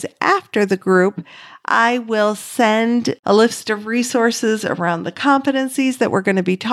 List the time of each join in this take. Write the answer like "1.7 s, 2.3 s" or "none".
none